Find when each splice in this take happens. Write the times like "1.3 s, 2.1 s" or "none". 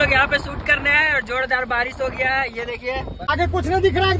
3.3 s